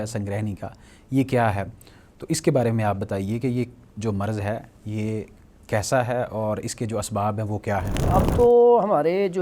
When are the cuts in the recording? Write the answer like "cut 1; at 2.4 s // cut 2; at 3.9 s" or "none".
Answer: cut 1; at 8.1 s

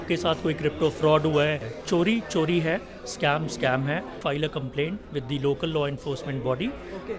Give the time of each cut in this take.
cut 1; at 1.7 s // cut 2; at 4.2 s

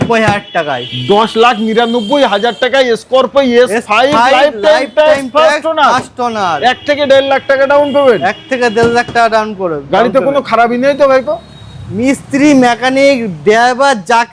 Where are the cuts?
none

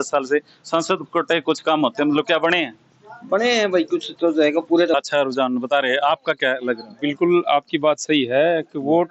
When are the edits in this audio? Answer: cut 1; at 4.9 s

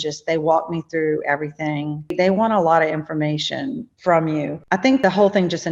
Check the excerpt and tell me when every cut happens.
cut 1; at 2.1 s // cut 2; at 3.9 s // cut 3; at 4.9 s

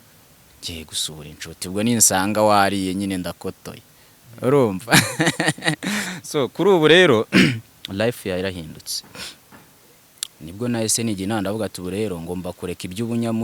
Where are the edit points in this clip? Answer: cut 1; at 9.8 s

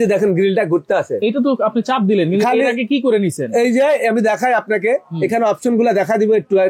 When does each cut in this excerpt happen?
none

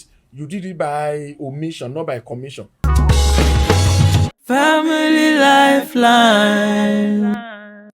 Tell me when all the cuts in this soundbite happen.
cut 1; at 2.8 s

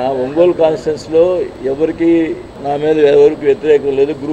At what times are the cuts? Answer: cut 1; at 1.5 s // cut 2; at 2.5 s

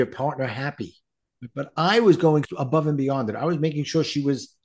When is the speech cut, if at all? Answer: cut 1; at 1.4 s // cut 2; at 2.6 s

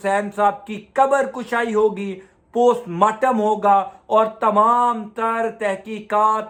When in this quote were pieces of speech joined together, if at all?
none

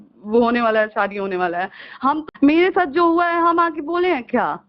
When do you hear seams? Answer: cut 1; at 2.3 s

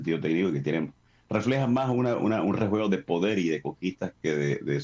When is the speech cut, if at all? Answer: none

